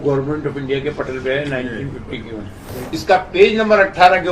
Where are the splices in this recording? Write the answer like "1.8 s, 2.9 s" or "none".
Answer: 2.7 s